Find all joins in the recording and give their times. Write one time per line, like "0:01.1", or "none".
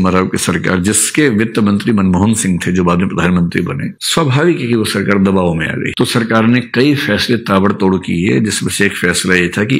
0:05.9